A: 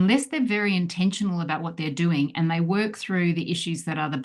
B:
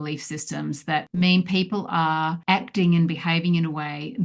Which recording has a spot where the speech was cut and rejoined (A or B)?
B